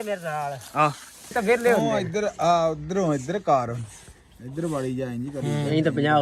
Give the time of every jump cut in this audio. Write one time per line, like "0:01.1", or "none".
0:01.3